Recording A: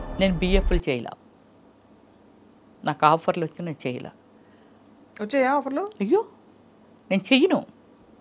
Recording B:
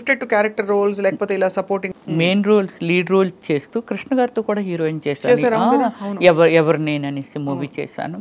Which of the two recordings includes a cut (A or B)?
B